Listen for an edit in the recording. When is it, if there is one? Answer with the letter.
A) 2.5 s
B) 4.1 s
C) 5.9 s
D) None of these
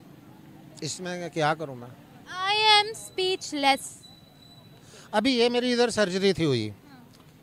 D